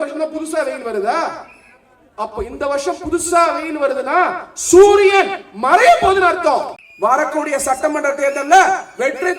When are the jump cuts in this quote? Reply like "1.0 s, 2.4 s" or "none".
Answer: 6.8 s